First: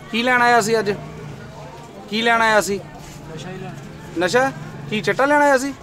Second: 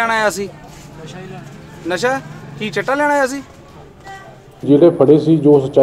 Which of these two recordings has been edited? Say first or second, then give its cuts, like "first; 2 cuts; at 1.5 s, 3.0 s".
second; 1 cut; at 4.6 s